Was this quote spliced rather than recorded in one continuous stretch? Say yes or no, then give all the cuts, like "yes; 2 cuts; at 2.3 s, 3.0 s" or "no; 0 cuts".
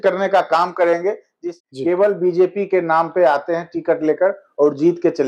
yes; 1 cut; at 1.3 s